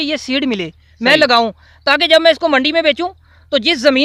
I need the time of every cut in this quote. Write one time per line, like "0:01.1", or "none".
none